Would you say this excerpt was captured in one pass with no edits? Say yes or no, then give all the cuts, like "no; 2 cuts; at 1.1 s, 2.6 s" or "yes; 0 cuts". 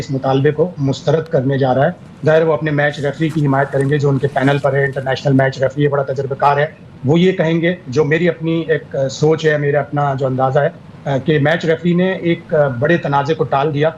no; 1 cut; at 10.5 s